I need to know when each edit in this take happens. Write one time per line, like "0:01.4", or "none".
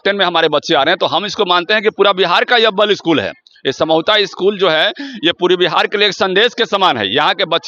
none